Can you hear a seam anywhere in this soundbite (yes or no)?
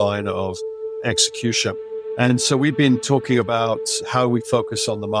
yes